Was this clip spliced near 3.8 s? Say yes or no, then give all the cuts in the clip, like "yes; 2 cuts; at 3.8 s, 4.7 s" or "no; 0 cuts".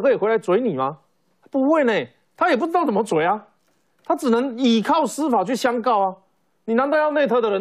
no; 0 cuts